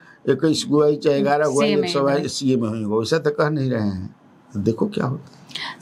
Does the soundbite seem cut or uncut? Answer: uncut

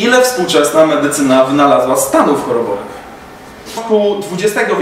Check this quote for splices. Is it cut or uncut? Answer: cut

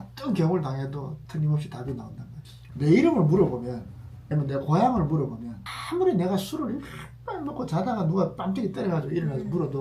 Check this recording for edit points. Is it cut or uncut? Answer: cut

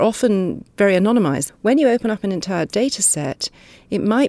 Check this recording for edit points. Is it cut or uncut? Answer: cut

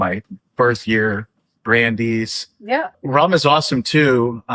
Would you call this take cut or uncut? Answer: cut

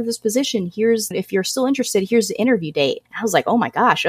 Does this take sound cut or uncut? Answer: cut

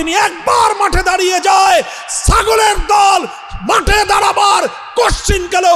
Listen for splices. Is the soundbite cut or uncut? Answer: uncut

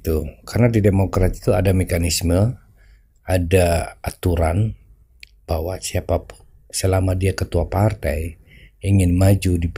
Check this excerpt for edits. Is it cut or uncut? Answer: uncut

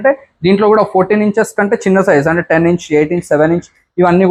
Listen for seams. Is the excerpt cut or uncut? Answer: uncut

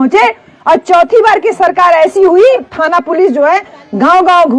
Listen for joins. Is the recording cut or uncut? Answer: cut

